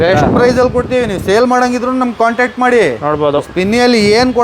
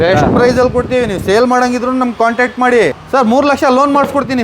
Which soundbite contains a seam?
second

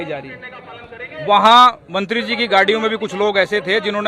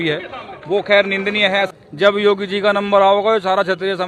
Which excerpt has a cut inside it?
second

